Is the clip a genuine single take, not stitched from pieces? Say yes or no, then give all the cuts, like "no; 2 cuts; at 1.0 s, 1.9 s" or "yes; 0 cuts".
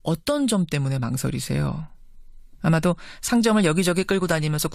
yes; 0 cuts